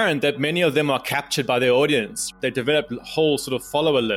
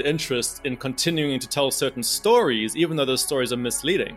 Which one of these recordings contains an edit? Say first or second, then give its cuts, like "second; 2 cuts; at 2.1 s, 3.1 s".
first; 1 cut; at 2.3 s